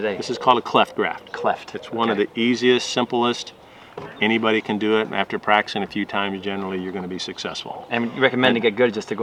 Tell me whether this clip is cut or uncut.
uncut